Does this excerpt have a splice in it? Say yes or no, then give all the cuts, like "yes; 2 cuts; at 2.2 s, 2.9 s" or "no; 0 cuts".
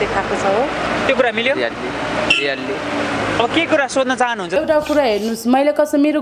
yes; 1 cut; at 4.5 s